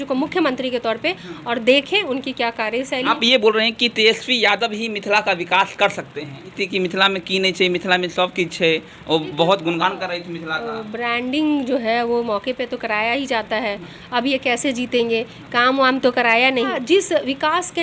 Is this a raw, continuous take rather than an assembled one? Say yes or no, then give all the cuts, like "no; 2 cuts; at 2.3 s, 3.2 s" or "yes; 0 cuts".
no; 3 cuts; at 3.1 s, 6.6 s, 16.8 s